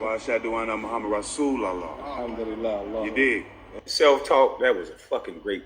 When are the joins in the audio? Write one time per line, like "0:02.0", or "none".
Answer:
0:04.5